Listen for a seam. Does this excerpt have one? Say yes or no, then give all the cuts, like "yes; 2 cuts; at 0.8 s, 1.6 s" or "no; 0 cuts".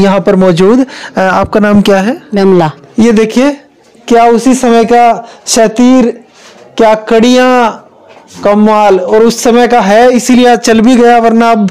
yes; 1 cut; at 2.8 s